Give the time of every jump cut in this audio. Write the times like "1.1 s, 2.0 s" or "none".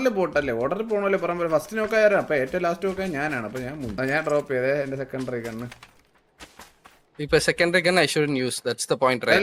3.9 s